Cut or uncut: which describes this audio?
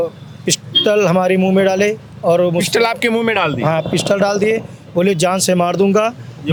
uncut